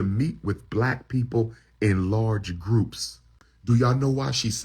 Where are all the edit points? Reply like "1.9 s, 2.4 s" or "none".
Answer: 3.5 s